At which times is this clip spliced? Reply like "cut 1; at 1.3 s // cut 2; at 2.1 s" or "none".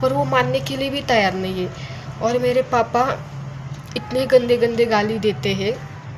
none